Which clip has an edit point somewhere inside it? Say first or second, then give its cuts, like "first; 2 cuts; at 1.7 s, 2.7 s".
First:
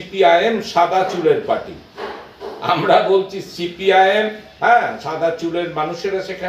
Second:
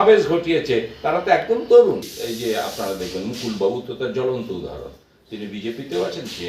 second; 1 cut; at 2.2 s